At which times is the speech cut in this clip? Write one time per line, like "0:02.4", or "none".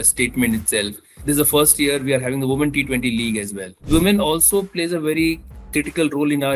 0:01.1
0:03.9